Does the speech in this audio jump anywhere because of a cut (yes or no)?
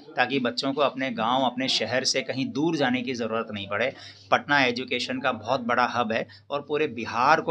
no